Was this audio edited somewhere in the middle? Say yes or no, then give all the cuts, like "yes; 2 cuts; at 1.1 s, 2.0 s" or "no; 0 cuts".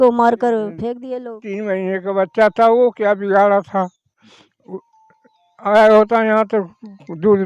yes; 1 cut; at 1.0 s